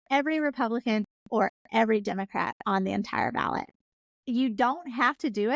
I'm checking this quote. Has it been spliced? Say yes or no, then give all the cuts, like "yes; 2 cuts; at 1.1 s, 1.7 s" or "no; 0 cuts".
no; 0 cuts